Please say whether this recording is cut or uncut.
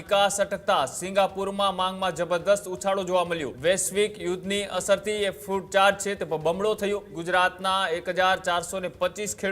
cut